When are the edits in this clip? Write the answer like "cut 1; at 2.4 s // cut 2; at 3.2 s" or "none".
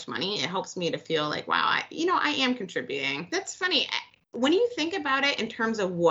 cut 1; at 3.2 s